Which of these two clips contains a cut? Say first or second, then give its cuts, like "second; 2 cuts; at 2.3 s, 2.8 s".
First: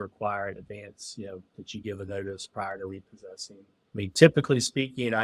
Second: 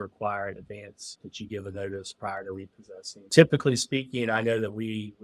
second; 2 cuts; at 1.1 s, 3.3 s